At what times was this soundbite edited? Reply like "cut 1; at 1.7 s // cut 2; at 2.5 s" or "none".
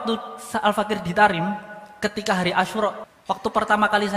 cut 1; at 3.0 s